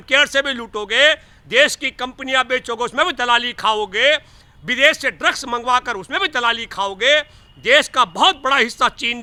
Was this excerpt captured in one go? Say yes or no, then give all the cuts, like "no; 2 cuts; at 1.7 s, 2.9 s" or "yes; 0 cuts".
yes; 0 cuts